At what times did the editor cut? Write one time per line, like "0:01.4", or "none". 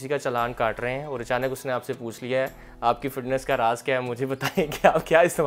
none